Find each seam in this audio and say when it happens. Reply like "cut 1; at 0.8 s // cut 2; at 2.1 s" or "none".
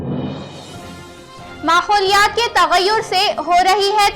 cut 1; at 1.2 s

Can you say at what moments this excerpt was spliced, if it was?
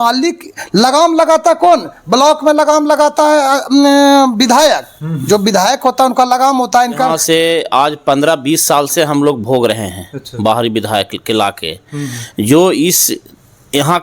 cut 1; at 7.2 s

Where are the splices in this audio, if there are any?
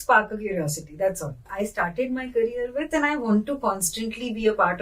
cut 1; at 1.5 s

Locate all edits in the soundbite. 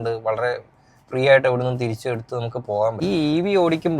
cut 1; at 3.0 s

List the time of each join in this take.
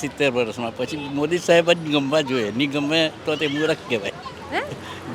none

